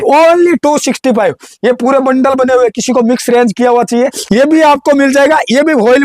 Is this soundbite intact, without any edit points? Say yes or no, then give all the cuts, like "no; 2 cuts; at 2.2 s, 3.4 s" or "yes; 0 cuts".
no; 1 cut; at 4.2 s